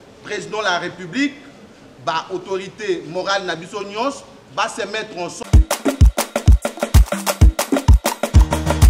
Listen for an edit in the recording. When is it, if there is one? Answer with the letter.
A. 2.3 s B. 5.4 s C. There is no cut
B